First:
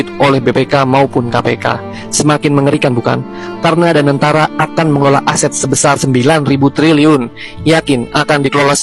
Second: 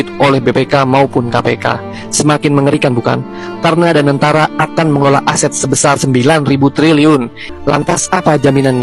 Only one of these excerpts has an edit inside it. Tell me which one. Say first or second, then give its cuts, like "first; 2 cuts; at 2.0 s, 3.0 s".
second; 1 cut; at 7.5 s